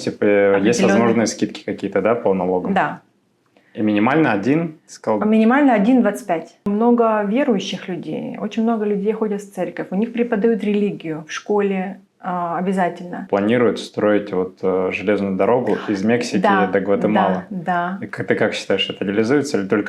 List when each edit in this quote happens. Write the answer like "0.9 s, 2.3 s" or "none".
6.6 s, 13.2 s